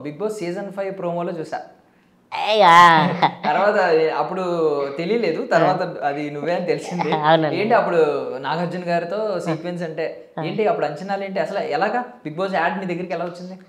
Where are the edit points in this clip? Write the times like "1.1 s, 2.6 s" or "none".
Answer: none

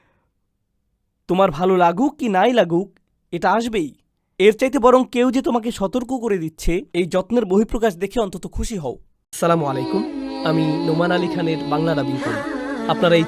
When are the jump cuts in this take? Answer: 9.2 s

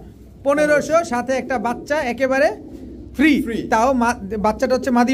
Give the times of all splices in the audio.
none

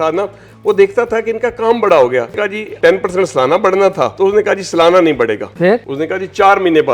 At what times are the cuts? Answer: 2.5 s, 4.1 s, 5.6 s

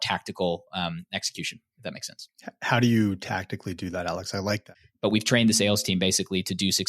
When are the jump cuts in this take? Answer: 4.7 s

